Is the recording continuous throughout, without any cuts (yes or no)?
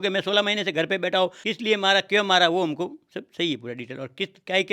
no